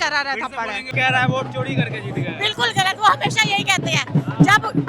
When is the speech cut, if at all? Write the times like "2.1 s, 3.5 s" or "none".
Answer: 0.9 s